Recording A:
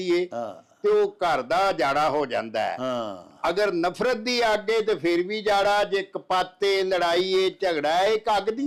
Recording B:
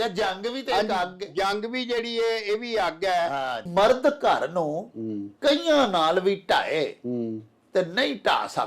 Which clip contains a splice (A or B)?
B